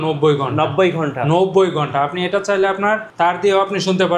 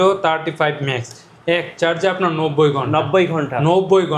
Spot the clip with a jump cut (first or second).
first